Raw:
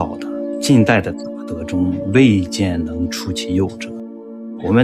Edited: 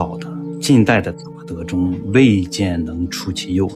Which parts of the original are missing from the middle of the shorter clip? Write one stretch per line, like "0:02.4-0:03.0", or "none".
none